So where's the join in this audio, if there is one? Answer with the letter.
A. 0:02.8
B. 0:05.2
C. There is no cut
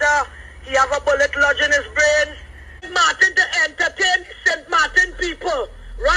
A